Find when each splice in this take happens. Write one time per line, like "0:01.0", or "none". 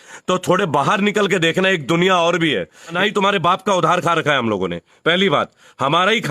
0:02.8